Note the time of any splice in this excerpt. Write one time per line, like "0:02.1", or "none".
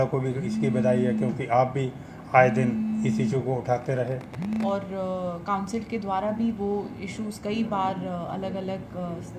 0:04.7